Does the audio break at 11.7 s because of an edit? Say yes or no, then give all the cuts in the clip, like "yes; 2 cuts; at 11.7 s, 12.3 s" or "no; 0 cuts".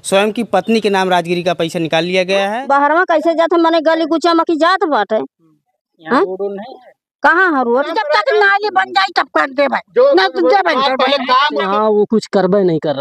yes; 3 cuts; at 2.6 s, 8.0 s, 11.7 s